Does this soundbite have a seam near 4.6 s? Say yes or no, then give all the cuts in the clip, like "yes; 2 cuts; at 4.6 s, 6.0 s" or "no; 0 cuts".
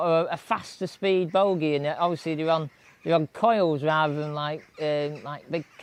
no; 0 cuts